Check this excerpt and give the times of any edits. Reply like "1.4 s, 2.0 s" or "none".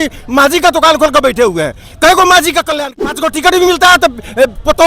2.7 s